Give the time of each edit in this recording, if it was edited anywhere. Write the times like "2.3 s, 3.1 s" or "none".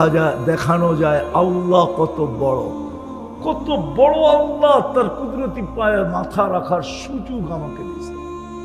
7.6 s

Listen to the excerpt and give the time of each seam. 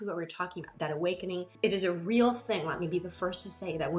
1.5 s

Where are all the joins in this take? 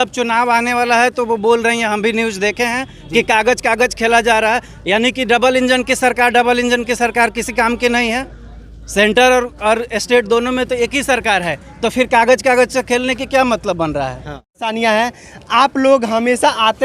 14.5 s

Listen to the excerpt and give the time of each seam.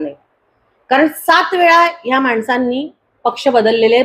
none

